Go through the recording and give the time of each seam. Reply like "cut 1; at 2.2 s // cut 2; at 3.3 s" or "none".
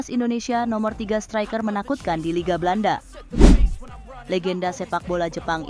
cut 1; at 3.2 s